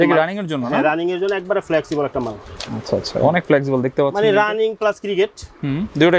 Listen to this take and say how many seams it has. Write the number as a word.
zero